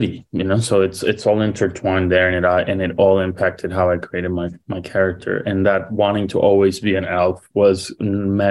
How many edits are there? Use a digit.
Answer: 0